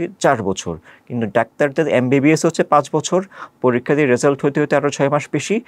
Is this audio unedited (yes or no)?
yes